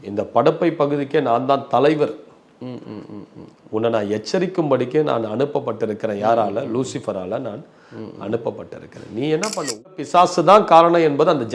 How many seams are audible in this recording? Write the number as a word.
one